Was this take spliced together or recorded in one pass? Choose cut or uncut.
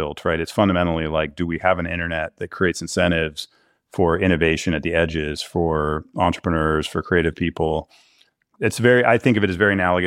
uncut